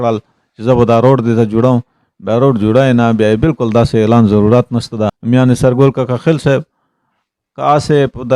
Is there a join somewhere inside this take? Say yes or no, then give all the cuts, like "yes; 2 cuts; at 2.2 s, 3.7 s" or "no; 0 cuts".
yes; 1 cut; at 5.2 s